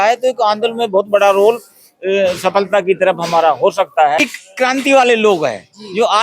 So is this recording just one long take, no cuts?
no; 1 cut; at 4.2 s

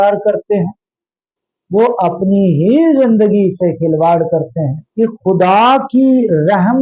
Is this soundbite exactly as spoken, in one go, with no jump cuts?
no; 1 cut; at 4.8 s

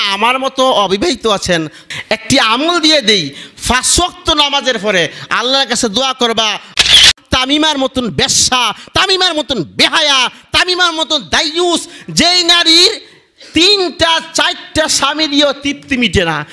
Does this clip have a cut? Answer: yes; 2 cuts; at 2.0 s, 6.8 s

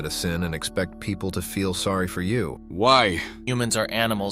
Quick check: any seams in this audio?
yes; 2 cuts; at 2.6 s, 3.4 s

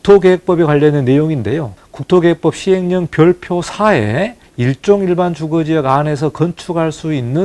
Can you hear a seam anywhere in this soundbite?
yes; 1 cut; at 4.4 s

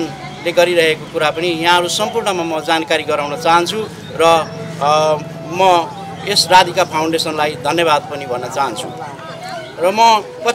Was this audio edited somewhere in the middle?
no; 0 cuts

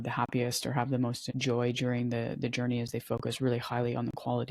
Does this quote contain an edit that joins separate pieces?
yes; 1 cut; at 1.2 s

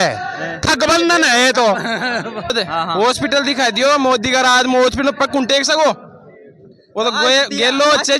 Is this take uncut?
no; 1 cut; at 2.5 s

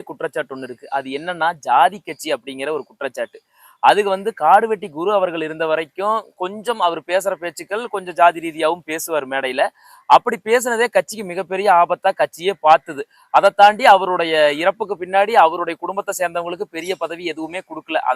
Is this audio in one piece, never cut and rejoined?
yes; 0 cuts

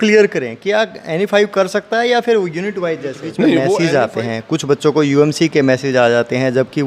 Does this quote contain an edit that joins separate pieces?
yes; 1 cut; at 3.8 s

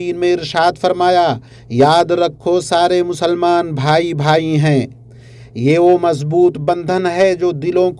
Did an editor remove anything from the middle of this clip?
no; 0 cuts

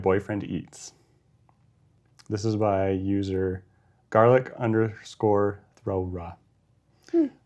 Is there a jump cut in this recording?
no; 0 cuts

